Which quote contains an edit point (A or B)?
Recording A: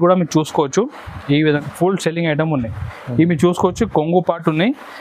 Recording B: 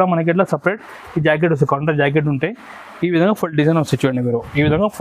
A